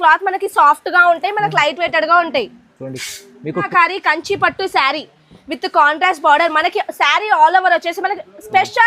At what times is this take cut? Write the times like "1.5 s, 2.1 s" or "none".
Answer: 3.7 s